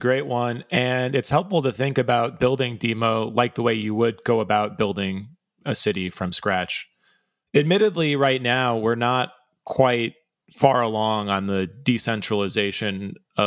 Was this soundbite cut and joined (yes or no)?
no